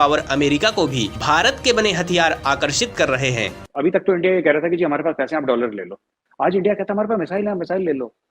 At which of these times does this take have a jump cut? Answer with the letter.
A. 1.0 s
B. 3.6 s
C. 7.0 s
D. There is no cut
B